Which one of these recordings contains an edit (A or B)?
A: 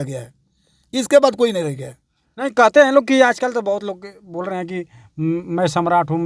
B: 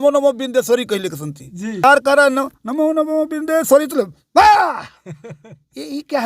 B